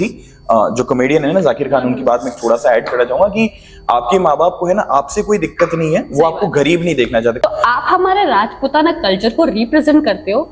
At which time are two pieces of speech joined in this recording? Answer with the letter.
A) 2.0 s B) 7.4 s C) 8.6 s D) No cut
B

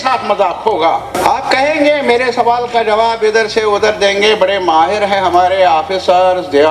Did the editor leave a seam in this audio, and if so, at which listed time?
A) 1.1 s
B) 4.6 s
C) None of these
A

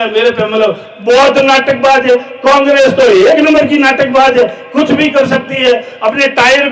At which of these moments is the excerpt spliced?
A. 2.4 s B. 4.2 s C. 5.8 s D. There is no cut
D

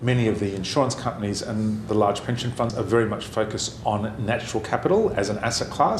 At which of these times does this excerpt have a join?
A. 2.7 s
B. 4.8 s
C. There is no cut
A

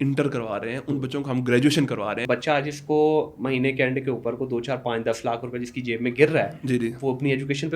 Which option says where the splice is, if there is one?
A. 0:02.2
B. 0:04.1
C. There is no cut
A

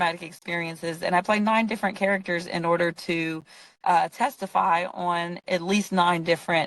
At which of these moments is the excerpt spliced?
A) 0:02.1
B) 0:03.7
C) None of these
C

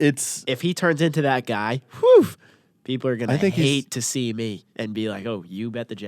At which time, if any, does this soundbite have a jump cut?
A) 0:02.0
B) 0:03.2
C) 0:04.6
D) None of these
C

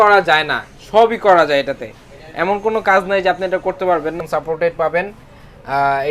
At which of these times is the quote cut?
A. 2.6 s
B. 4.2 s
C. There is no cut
B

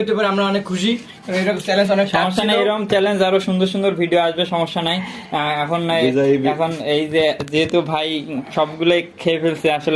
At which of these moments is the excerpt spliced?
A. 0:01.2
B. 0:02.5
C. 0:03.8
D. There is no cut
D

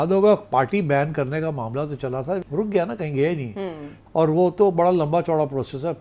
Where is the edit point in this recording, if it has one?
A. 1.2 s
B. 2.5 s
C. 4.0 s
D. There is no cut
D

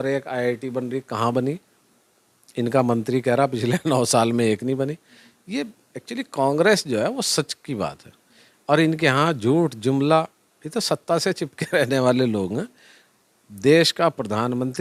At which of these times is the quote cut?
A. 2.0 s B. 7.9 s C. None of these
C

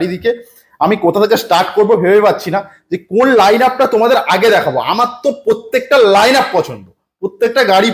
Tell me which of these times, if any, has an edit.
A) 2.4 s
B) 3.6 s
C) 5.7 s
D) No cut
D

